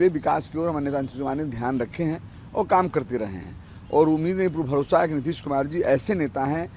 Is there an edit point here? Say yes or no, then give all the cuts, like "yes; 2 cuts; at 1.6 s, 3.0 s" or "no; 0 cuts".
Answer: no; 0 cuts